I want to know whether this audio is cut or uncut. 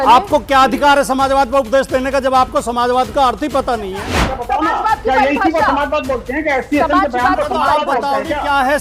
cut